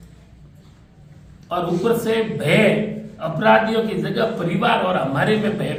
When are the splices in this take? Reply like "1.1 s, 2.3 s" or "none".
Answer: none

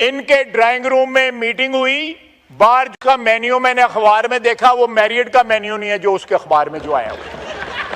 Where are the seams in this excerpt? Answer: 2.9 s

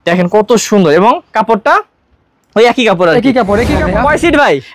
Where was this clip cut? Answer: 3.8 s

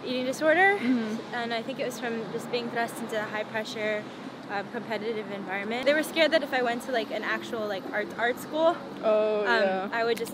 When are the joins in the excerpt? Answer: 5.8 s

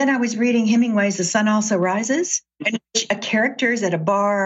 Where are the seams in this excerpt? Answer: 2.5 s

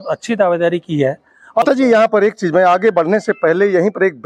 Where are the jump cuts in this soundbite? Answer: 1.6 s

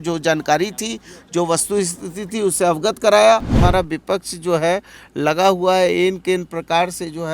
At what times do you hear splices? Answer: 3.6 s

